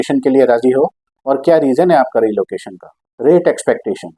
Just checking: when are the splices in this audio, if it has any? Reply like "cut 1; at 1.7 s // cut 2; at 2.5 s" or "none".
none